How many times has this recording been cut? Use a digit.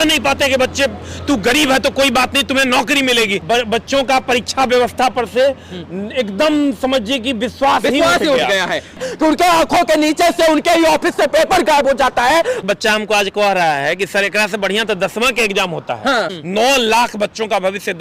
4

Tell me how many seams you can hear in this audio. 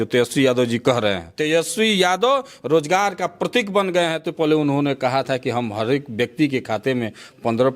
2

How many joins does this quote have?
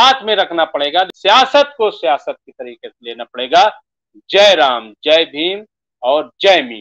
1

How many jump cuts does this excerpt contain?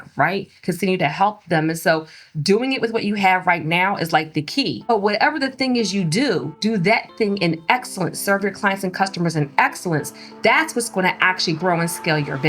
2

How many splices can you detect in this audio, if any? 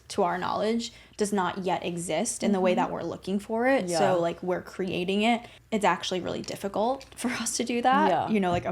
1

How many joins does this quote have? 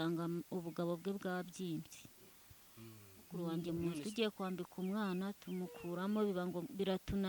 1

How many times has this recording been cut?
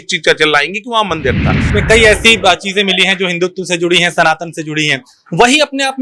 1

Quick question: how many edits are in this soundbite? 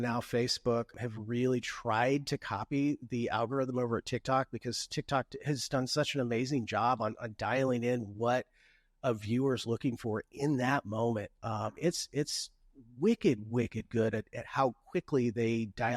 1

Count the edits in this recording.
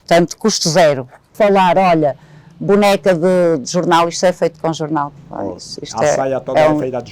1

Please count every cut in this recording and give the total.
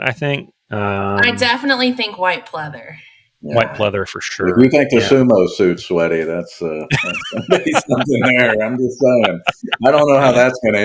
0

